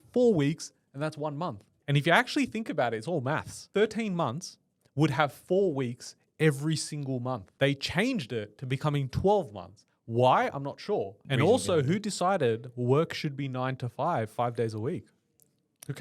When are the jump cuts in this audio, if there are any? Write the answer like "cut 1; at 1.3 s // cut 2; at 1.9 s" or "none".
cut 1; at 1.7 s // cut 2; at 3.6 s // cut 3; at 7.5 s // cut 4; at 11.2 s